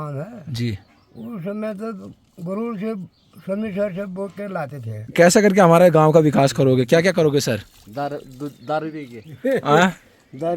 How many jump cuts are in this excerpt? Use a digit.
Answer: 1